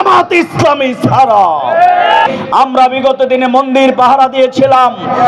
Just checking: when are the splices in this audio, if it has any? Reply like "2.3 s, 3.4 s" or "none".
2.3 s